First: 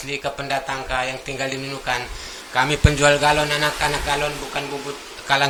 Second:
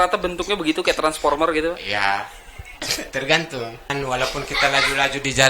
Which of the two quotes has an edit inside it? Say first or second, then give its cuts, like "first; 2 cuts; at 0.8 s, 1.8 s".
second; 1 cut; at 3.9 s